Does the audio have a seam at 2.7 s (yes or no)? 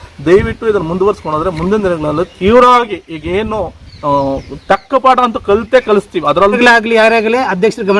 no